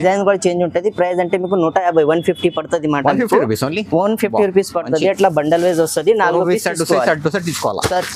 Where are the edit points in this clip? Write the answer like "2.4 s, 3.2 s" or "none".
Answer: none